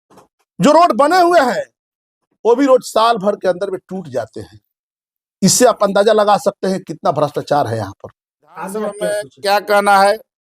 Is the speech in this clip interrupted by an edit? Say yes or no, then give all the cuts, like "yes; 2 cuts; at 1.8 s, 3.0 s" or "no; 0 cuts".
yes; 1 cut; at 9.0 s